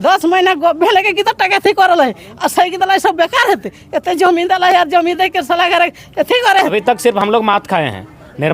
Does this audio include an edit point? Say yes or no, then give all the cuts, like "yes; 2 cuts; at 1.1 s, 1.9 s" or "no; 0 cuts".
yes; 1 cut; at 6.7 s